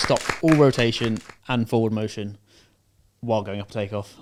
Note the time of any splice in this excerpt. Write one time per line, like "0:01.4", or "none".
none